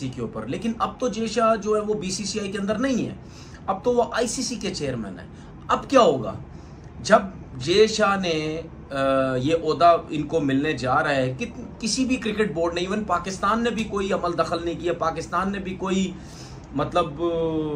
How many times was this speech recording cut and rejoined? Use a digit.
0